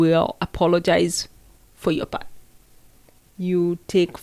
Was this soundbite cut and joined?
no; 0 cuts

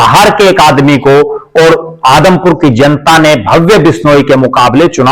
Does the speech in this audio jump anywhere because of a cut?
no; 0 cuts

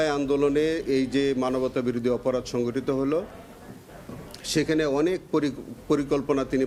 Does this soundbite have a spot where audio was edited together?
no; 0 cuts

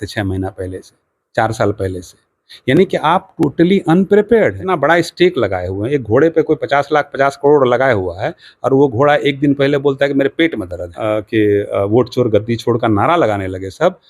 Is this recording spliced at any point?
yes; 2 cuts; at 4.6 s, 10.9 s

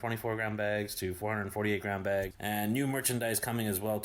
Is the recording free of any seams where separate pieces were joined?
yes; 0 cuts

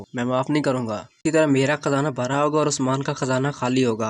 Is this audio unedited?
no; 1 cut; at 1.2 s

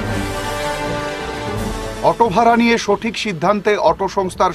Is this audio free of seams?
yes; 0 cuts

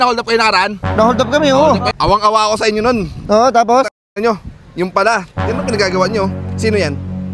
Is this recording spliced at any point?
yes; 1 cut; at 1.9 s

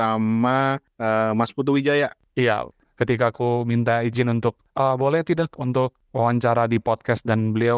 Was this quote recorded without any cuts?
no; 2 cuts; at 2.8 s, 6.0 s

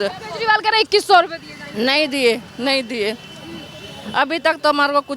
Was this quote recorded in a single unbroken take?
yes; 0 cuts

